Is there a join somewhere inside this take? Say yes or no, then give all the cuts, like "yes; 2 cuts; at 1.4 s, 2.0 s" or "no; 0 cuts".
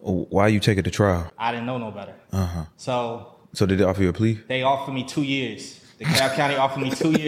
yes; 1 cut; at 1.3 s